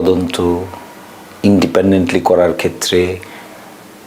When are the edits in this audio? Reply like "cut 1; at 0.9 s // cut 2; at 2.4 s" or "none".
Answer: none